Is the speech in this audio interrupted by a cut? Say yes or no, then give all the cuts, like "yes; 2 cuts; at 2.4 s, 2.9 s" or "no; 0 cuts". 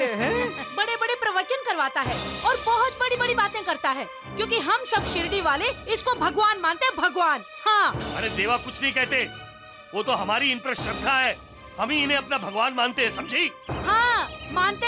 no; 0 cuts